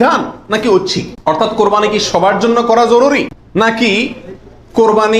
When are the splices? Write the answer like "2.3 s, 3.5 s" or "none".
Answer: 1.1 s, 3.6 s